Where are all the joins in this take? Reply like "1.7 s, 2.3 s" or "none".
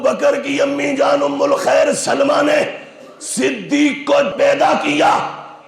4.3 s